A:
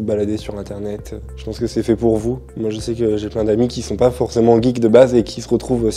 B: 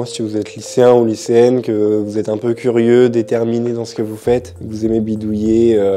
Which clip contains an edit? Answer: A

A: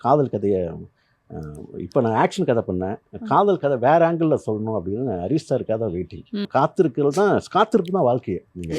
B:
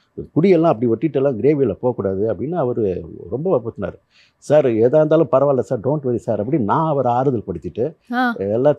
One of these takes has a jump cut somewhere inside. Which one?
A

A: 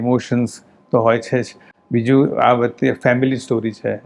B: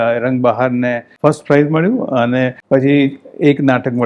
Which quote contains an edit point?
B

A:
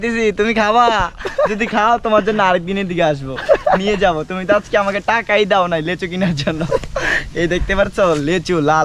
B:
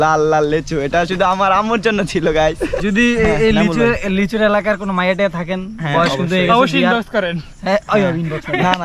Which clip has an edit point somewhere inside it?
B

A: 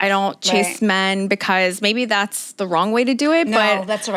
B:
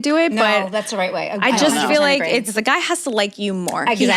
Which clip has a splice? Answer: B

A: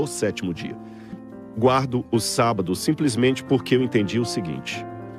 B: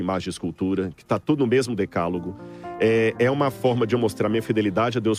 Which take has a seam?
A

